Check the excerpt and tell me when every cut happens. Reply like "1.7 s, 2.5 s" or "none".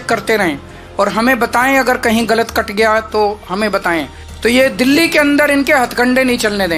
4.2 s